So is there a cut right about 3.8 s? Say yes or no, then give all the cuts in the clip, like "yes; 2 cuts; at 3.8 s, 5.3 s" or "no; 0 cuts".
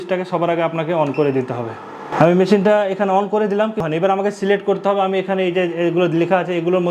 yes; 2 cuts; at 2.1 s, 3.8 s